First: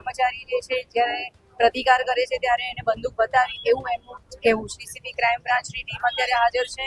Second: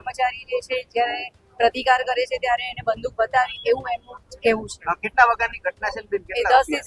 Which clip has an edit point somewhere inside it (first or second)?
first